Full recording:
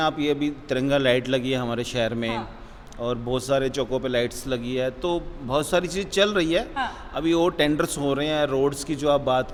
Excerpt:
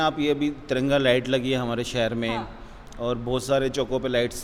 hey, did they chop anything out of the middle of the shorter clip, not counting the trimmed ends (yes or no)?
no